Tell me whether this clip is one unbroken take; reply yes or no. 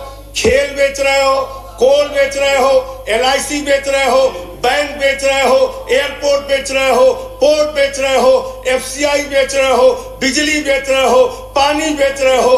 yes